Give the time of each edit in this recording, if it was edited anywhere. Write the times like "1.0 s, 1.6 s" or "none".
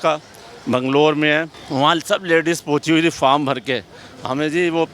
1.6 s